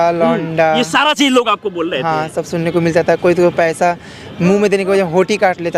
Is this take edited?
no; 0 cuts

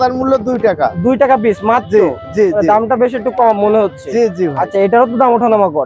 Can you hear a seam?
no; 0 cuts

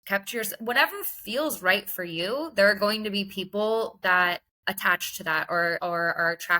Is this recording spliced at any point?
yes; 2 cuts; at 4.5 s, 5.8 s

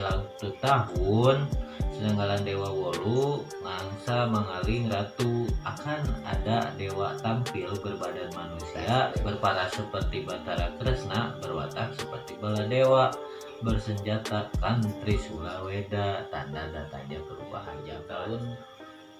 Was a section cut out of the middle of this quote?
yes; 1 cut; at 17.8 s

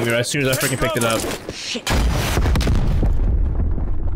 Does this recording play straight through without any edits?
yes; 0 cuts

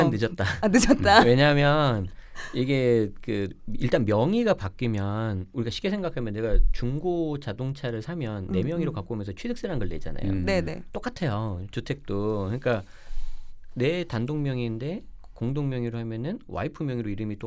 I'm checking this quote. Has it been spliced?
no; 0 cuts

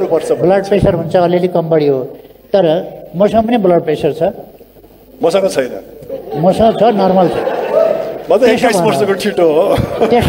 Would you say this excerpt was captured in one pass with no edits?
yes; 0 cuts

